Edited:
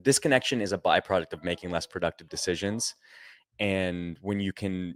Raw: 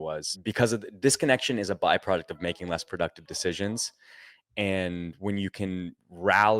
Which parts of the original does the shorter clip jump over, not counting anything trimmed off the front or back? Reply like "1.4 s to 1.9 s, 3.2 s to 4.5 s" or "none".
none